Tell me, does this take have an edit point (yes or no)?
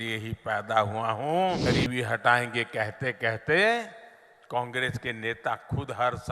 yes